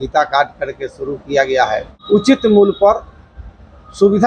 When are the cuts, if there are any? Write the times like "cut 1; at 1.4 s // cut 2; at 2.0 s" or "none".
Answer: cut 1; at 2.3 s